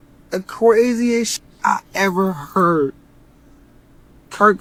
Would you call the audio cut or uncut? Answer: uncut